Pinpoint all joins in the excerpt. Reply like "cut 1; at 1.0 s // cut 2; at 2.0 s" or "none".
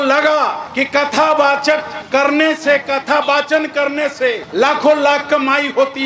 none